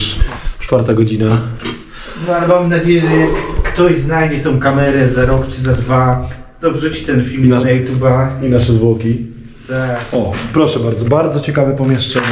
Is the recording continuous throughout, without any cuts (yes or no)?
no